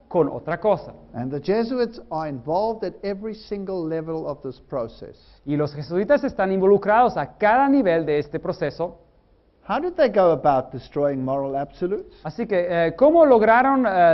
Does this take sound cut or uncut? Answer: cut